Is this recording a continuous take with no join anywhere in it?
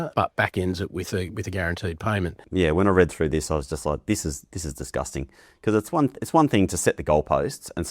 no; 1 cut; at 2.4 s

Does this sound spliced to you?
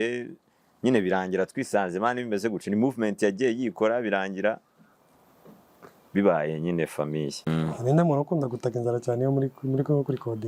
yes; 1 cut; at 7.5 s

